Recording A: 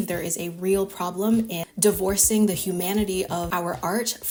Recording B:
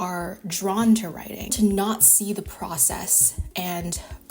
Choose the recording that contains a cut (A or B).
B